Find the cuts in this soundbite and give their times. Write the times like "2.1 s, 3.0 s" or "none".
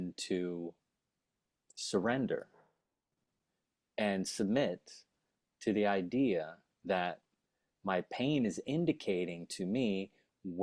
none